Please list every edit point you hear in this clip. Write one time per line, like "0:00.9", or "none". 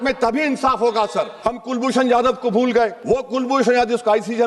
0:01.3
0:03.0